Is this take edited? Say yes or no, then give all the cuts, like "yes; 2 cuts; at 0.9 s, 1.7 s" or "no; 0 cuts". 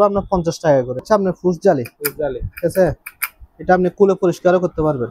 yes; 1 cut; at 1.0 s